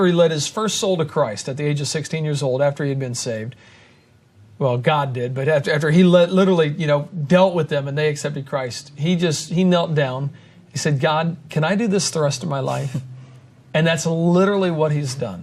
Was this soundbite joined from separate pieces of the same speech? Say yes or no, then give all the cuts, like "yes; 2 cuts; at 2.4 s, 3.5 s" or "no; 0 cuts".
no; 0 cuts